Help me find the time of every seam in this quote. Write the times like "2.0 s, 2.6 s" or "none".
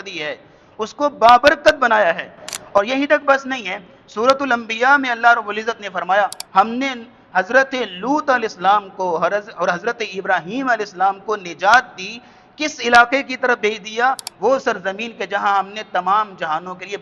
6.4 s, 14.3 s